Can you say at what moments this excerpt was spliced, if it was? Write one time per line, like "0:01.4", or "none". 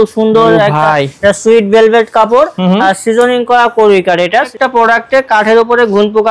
0:04.4